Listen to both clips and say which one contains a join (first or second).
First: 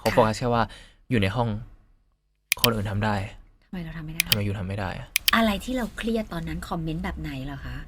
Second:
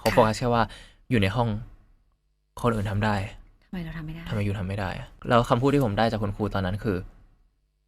first